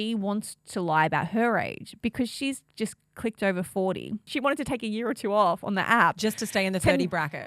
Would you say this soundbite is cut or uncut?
cut